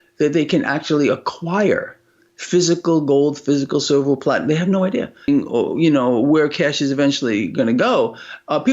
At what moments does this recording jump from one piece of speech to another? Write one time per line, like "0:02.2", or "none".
0:05.3

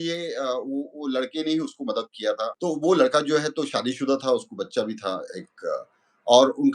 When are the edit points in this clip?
0:02.5

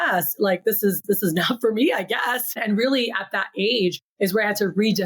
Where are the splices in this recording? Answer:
0:02.5
0:04.1

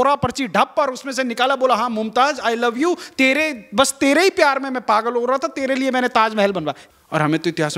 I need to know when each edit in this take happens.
0:06.8

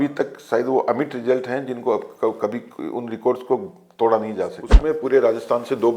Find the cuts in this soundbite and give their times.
0:04.6

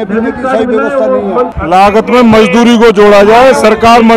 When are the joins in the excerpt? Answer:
0:01.5

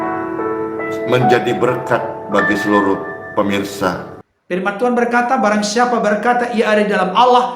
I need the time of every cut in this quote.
0:04.2

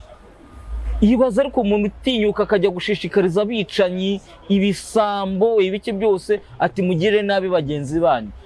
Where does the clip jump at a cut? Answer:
none

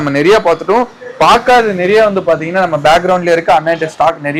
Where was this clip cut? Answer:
none

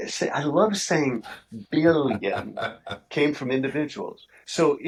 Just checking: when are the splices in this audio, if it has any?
none

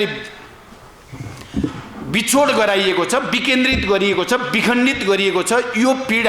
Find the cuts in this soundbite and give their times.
none

